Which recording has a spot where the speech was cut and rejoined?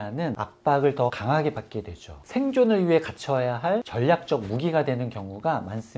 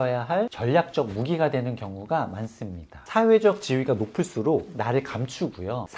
first; 1 cut; at 2.2 s

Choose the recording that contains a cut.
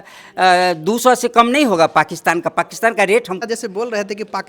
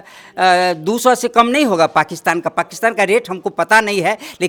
first; 1 cut; at 3.3 s

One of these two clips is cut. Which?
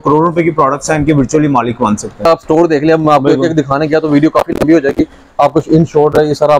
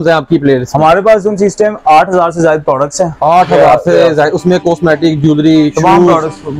first; 1 cut; at 2.3 s

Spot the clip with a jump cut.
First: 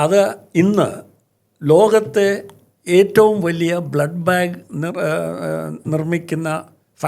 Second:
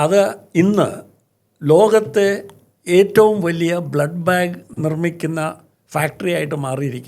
second; 1 cut; at 4.7 s

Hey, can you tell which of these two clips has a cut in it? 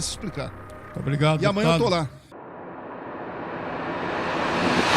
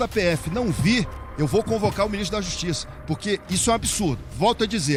first; 1 cut; at 2.3 s

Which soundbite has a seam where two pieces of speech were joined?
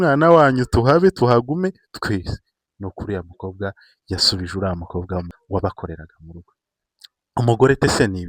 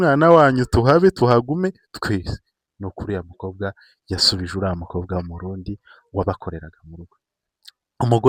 first; 1 cut; at 5.3 s

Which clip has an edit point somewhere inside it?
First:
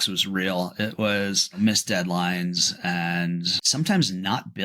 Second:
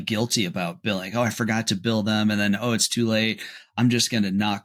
first; 2 cuts; at 1.4 s, 3.6 s

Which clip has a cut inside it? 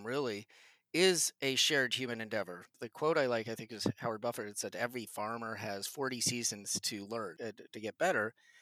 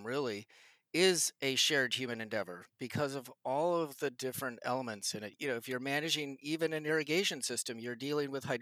first; 2 cuts; at 2.6 s, 7.3 s

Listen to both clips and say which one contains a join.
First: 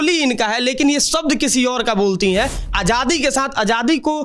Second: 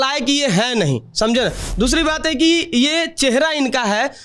first; 1 cut; at 2.6 s

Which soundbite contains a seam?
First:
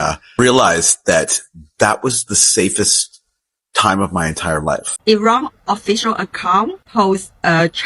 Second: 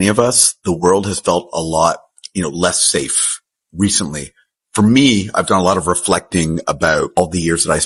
first; 1 cut; at 4.9 s

